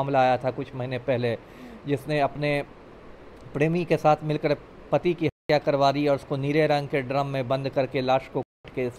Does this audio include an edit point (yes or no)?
no